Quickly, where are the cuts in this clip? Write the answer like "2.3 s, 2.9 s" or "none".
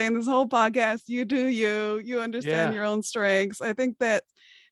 none